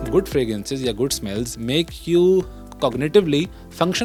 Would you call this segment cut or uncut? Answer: uncut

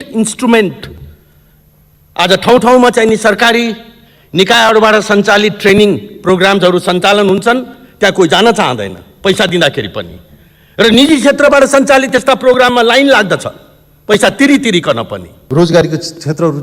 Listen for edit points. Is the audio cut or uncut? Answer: cut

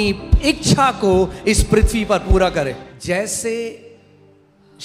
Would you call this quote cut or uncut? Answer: cut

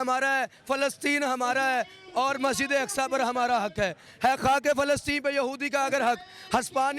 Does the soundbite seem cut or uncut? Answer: uncut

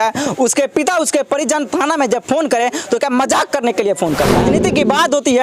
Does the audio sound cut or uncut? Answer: cut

